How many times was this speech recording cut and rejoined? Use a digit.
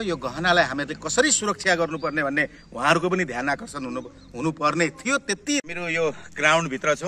1